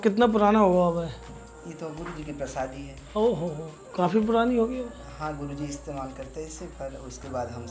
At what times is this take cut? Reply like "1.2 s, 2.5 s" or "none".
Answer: none